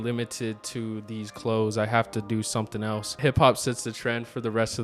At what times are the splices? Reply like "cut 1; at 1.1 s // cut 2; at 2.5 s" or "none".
cut 1; at 3.2 s